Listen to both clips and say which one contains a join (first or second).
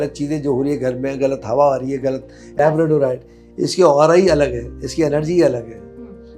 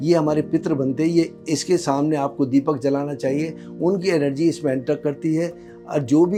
first